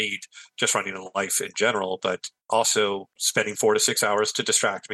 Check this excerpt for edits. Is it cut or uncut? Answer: cut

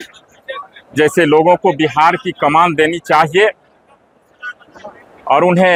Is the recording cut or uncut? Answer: uncut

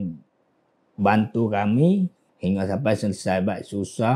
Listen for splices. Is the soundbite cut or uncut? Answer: cut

